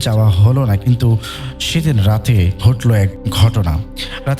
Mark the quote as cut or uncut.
cut